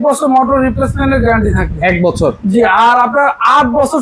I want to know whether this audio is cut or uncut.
uncut